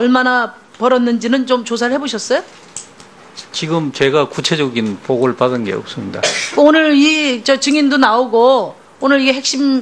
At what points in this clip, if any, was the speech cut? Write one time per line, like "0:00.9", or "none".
0:08.5